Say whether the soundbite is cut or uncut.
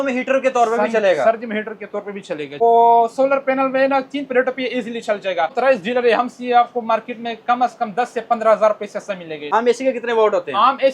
cut